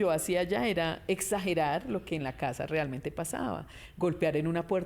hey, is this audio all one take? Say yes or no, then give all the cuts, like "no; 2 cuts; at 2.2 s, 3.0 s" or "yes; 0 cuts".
yes; 0 cuts